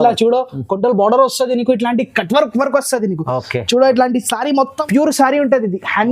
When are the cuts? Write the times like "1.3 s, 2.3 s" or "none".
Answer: 4.8 s